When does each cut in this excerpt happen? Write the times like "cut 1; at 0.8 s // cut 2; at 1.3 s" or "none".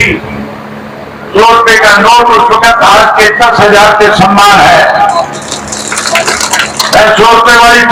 none